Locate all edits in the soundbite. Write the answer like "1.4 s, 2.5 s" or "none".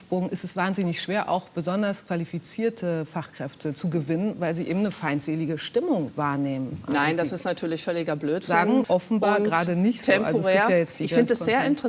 8.9 s